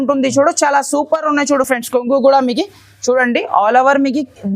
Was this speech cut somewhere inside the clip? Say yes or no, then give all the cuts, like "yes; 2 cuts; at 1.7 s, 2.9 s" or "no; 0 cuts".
no; 0 cuts